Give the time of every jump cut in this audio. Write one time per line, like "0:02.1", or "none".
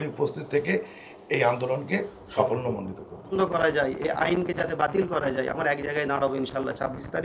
0:03.3